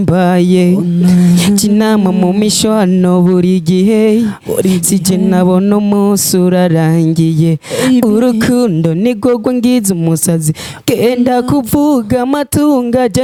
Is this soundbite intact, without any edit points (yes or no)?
yes